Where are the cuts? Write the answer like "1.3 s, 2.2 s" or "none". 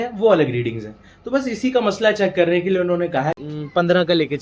3.4 s